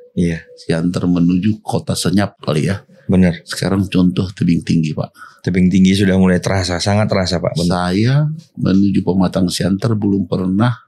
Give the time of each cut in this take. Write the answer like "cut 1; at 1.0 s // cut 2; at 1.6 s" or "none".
none